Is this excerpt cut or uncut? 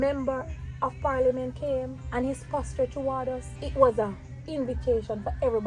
cut